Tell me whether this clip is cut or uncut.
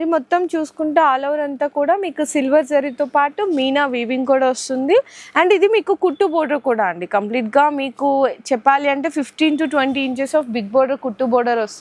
uncut